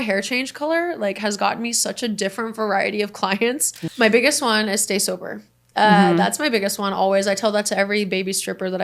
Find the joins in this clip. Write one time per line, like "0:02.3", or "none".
0:03.7